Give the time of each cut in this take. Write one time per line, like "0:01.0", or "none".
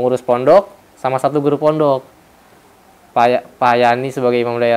none